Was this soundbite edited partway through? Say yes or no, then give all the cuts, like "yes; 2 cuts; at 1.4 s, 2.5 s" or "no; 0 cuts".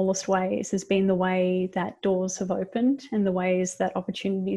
no; 0 cuts